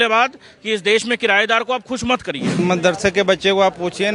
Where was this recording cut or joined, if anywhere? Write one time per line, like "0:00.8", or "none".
0:02.6